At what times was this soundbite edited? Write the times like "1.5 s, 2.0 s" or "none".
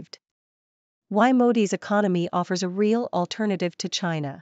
none